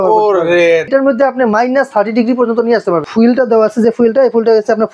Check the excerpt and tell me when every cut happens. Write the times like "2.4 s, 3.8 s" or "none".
0.9 s, 3.0 s